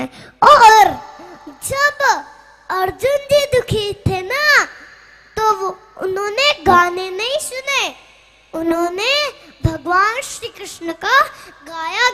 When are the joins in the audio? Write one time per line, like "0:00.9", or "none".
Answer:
none